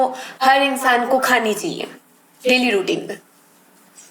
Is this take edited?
no; 0 cuts

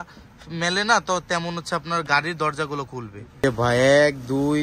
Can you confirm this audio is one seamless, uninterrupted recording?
no; 1 cut; at 3.4 s

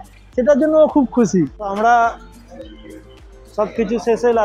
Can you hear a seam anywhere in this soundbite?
yes; 1 cut; at 1.6 s

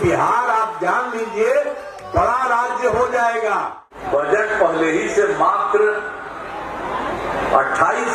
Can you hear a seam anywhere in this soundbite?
yes; 1 cut; at 4.0 s

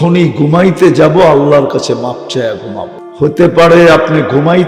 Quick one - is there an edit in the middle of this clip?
yes; 1 cut; at 3.0 s

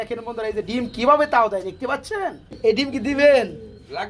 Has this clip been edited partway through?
yes; 1 cut; at 2.5 s

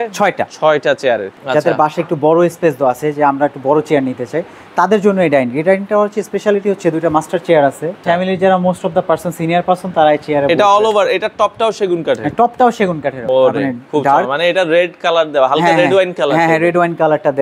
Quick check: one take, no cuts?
no; 3 cuts; at 1.3 s, 8.0 s, 13.2 s

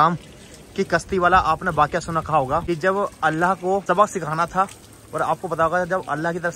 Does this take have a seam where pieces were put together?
yes; 2 cuts; at 2.6 s, 3.8 s

